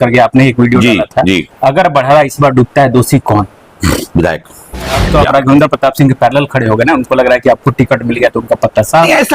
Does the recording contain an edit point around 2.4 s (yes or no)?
no